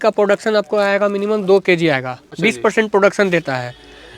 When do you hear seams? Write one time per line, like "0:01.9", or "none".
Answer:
0:02.2